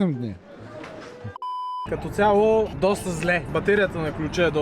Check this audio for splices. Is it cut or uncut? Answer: cut